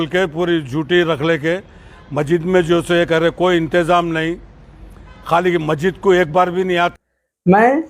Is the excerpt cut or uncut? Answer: cut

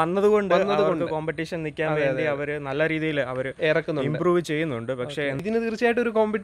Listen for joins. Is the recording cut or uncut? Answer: cut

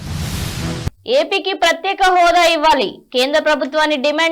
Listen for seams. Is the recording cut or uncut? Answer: cut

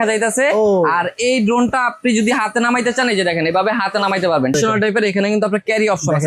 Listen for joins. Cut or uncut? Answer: cut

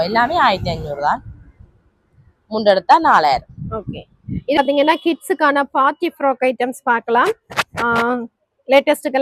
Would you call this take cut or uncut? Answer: cut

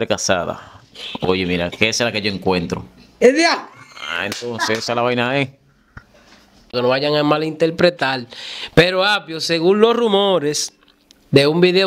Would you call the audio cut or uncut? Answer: cut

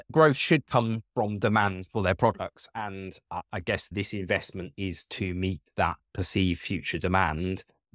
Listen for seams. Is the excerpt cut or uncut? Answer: uncut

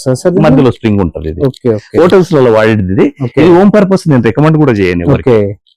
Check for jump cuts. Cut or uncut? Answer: uncut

